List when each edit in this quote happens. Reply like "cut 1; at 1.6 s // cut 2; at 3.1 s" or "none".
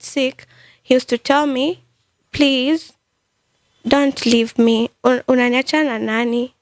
none